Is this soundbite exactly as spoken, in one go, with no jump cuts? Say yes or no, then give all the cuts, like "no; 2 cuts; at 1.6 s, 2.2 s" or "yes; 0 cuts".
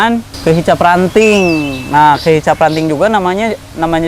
yes; 0 cuts